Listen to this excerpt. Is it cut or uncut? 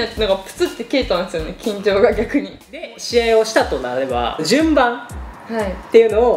cut